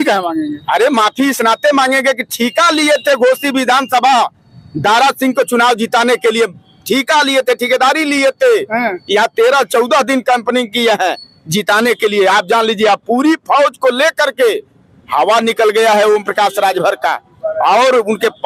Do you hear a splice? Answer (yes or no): no